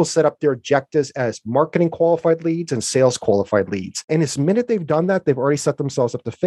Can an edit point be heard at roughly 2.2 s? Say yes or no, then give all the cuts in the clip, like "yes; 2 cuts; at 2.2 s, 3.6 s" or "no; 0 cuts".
no; 1 cut; at 4.0 s